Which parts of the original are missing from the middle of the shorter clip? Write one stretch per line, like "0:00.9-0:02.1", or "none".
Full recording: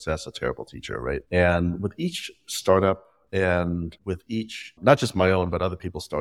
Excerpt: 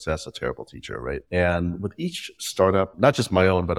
0:02.6-0:04.5